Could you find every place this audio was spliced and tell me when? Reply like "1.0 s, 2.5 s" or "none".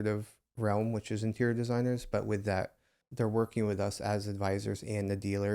3.1 s